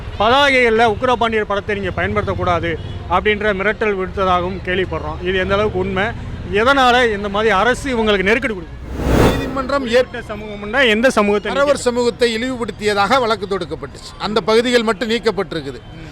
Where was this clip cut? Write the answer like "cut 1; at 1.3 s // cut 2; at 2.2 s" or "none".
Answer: cut 1; at 9.2 s